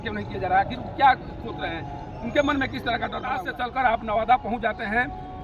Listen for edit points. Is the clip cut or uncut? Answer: cut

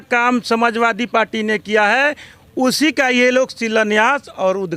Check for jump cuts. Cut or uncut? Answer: uncut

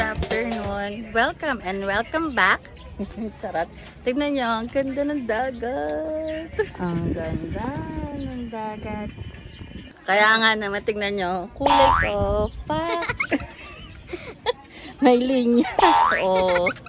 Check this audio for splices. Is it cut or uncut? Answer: cut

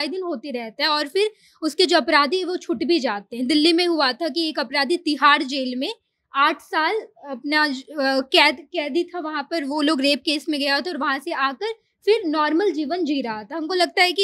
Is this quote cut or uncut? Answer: uncut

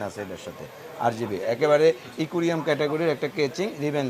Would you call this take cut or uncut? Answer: uncut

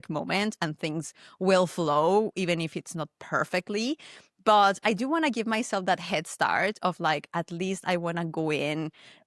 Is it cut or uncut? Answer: uncut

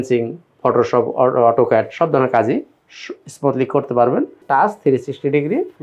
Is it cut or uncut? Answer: cut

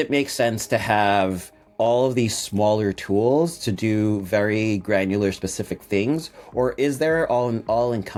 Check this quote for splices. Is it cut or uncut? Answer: uncut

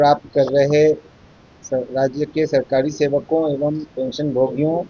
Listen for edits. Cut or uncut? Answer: uncut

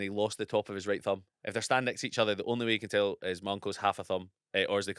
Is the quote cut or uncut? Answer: cut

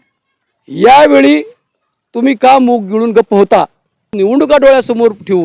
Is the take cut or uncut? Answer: cut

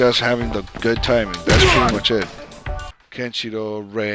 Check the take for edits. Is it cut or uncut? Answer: cut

